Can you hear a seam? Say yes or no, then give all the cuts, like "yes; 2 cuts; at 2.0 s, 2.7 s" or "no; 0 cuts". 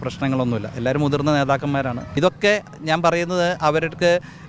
yes; 1 cut; at 2.0 s